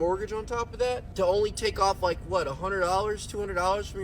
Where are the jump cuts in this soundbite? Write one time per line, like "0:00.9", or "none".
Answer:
none